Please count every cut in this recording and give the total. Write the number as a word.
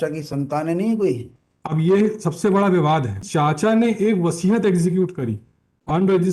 two